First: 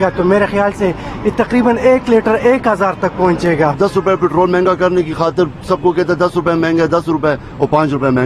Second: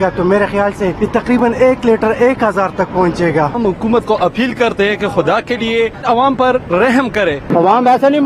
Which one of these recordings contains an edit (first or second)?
second